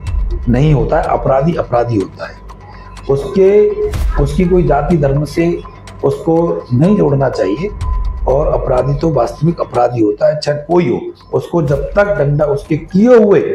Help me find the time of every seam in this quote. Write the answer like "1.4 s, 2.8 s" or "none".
none